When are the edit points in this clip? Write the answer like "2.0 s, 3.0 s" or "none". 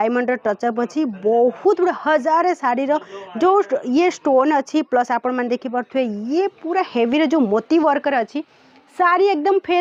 none